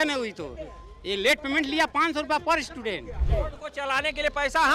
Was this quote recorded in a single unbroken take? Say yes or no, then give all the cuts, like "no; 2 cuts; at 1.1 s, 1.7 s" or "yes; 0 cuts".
no; 1 cut; at 3.2 s